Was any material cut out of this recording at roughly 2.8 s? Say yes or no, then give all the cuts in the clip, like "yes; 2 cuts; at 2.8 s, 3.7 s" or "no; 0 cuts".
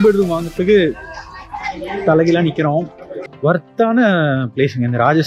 yes; 1 cut; at 2.8 s